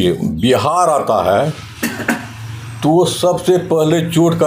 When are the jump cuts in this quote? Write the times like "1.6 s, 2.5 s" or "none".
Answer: none

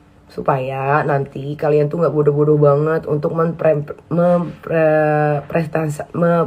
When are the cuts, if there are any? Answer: none

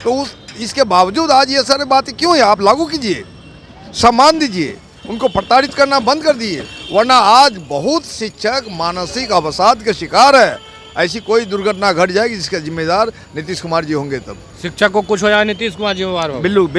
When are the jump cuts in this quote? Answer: none

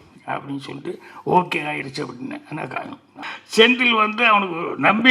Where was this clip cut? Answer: 3.1 s

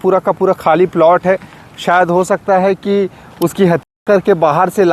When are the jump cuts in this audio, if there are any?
none

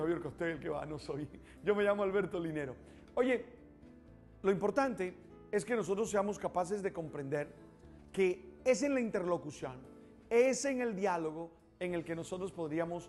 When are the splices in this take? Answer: none

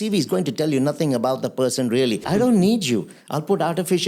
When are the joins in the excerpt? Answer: 2.2 s

